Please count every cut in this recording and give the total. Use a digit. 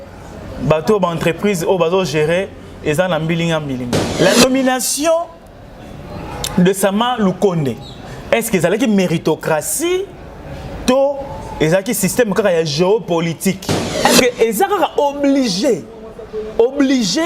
2